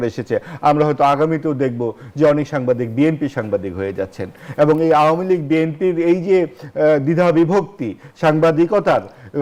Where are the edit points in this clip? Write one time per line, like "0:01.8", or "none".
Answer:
none